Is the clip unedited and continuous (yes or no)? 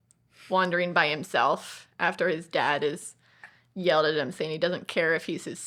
yes